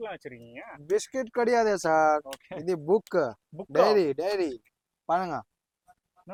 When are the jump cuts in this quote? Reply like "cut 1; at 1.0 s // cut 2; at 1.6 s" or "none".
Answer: none